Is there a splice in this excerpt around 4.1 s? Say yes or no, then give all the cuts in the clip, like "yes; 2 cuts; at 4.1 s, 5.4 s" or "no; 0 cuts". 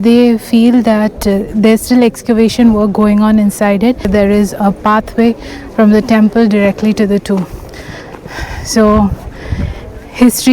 yes; 1 cut; at 4.1 s